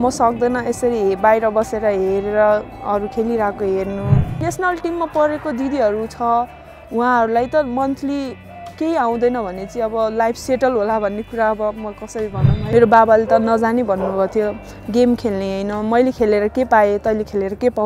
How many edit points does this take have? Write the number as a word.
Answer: two